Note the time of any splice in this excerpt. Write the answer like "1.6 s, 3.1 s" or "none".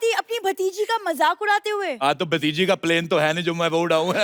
none

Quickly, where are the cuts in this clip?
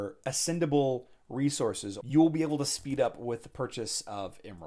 1.9 s

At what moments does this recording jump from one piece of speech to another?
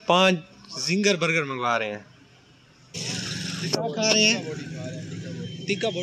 3.0 s

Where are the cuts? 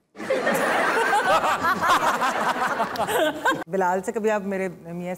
3.6 s

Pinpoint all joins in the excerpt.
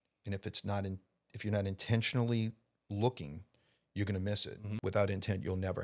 4.7 s

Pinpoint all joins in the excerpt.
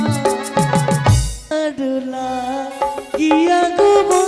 1.5 s

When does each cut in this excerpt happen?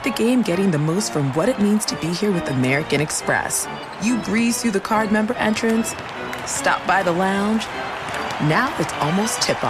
none

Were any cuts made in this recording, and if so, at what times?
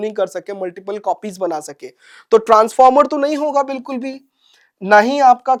none

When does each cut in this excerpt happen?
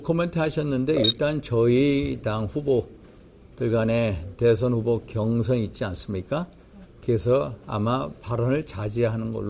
none

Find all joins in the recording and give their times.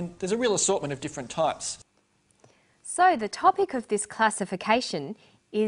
none

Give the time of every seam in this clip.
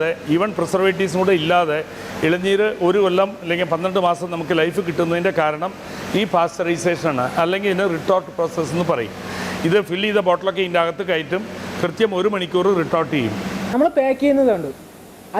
none

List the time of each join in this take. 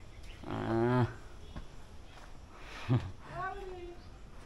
none

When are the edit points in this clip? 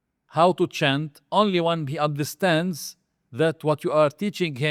none

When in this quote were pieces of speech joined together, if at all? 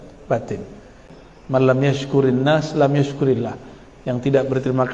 1.0 s

